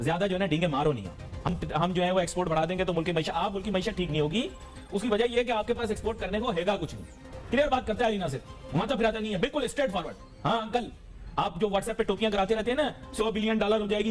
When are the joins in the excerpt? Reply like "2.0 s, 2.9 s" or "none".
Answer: none

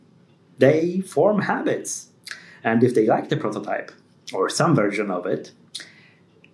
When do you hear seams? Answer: none

